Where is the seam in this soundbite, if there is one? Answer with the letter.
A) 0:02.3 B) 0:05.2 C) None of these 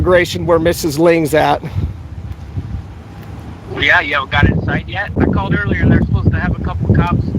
B